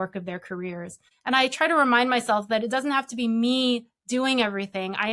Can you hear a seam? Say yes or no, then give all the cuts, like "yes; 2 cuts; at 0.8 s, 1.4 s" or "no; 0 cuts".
yes; 1 cut; at 1.0 s